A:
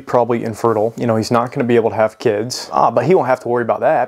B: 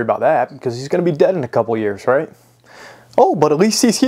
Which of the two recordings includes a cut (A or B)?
A